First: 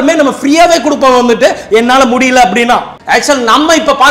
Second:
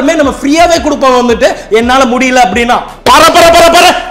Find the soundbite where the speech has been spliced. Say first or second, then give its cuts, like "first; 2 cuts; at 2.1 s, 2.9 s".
second; 1 cut; at 2.9 s